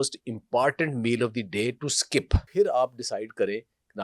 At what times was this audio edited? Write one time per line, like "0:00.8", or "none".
0:02.4